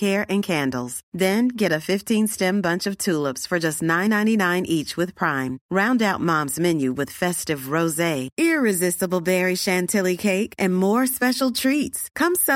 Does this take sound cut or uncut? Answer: uncut